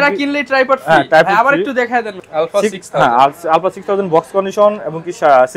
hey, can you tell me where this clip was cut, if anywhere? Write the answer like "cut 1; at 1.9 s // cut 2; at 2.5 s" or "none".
cut 1; at 2.2 s

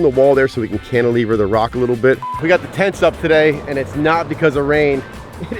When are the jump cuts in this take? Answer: cut 1; at 2.3 s

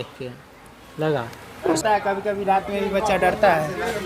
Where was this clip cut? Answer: cut 1; at 1.8 s

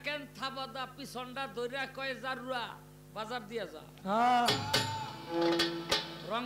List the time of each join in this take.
none

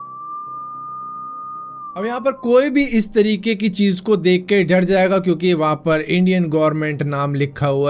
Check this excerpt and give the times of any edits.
none

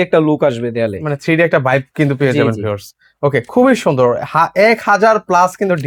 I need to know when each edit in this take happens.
none

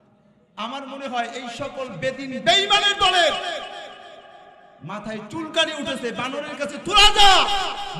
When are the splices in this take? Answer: none

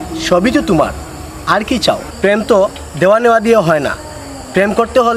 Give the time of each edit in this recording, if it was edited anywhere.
cut 1; at 2.1 s

